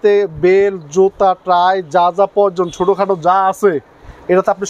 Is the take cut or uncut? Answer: uncut